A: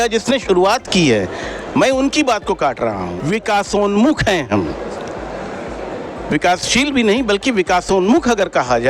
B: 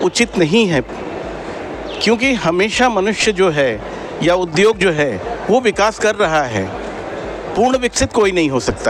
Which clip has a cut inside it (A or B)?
A